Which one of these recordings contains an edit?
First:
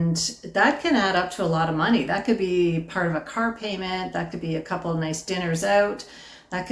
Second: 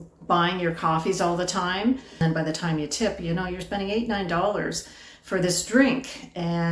second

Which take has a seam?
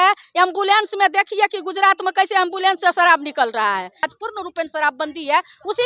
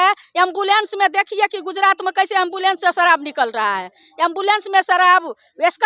first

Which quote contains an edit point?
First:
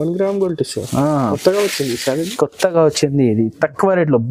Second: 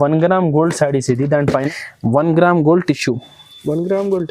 second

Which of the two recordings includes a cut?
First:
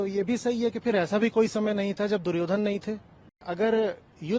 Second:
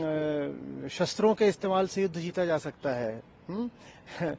first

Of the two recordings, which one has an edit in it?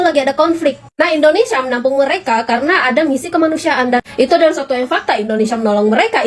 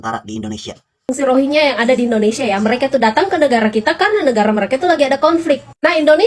second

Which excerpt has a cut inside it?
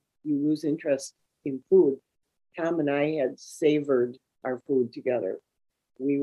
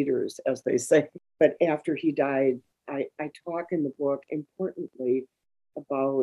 second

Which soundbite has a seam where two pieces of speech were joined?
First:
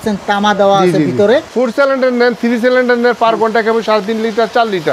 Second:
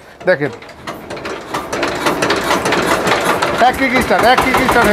first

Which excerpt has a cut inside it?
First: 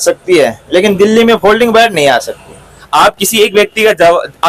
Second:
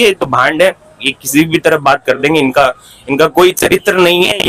first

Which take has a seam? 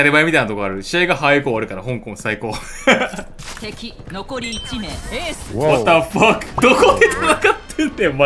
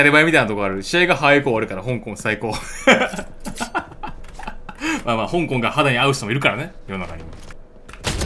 first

